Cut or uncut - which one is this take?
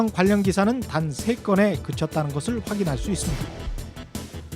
cut